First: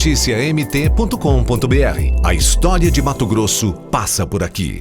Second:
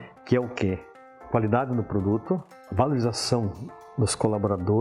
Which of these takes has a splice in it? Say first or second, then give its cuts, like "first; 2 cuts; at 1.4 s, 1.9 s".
second; 1 cut; at 2.6 s